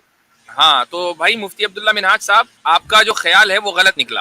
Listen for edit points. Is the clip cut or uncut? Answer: cut